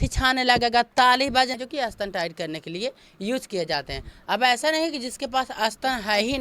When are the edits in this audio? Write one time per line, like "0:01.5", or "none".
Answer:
0:01.6